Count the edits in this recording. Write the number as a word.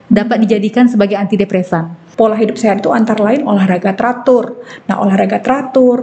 one